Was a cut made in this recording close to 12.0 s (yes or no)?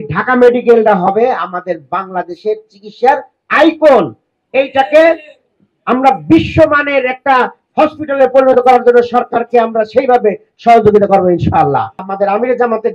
yes